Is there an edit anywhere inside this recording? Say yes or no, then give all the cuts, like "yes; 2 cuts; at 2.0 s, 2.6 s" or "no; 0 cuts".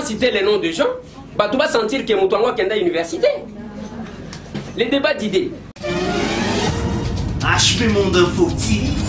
yes; 1 cut; at 5.8 s